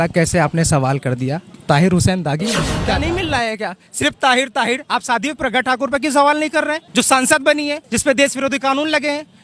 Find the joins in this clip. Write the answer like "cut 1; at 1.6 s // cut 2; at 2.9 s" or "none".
cut 1; at 2.8 s